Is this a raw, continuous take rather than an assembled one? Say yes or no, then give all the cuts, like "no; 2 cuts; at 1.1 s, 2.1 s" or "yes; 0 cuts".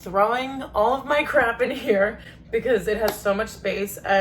yes; 0 cuts